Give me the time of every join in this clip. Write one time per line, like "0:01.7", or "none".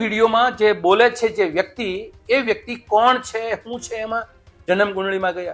none